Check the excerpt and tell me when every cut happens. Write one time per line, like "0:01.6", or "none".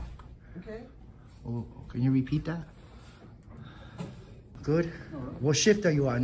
0:04.5